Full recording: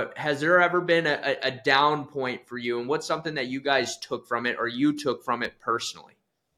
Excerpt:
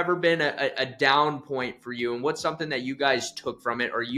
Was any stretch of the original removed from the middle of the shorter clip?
no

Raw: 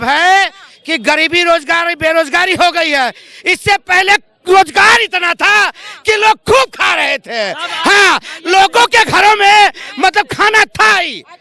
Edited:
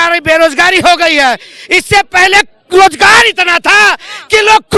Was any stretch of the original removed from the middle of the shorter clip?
no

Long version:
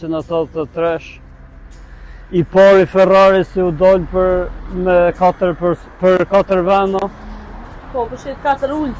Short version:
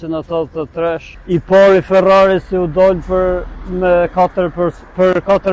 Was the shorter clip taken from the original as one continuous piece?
no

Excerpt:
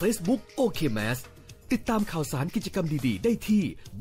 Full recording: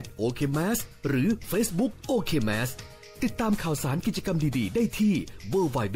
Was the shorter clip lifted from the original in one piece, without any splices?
yes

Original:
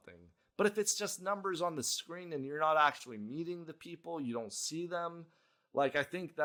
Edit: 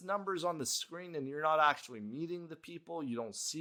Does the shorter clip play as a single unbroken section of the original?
yes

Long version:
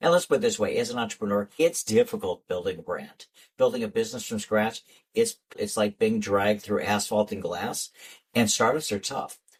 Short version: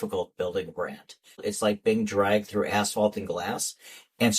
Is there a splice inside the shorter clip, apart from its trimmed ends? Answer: yes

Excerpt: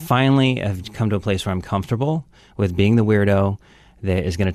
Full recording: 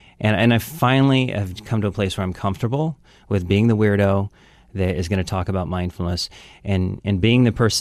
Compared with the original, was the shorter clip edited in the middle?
no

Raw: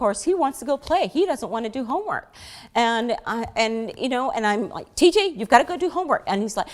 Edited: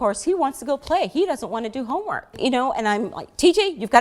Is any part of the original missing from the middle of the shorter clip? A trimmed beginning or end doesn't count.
yes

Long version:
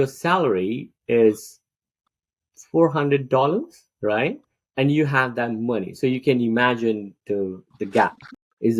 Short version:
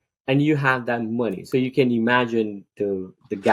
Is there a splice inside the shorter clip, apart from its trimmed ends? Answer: no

